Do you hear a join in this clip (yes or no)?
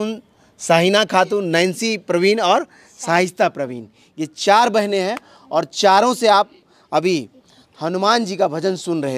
no